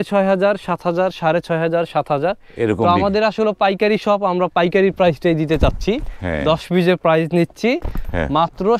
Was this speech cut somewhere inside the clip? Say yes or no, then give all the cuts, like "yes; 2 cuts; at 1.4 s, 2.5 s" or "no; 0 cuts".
no; 0 cuts